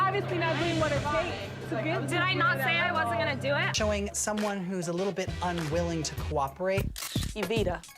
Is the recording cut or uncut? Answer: cut